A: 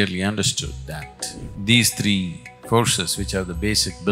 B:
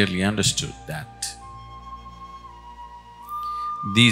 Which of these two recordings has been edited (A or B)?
A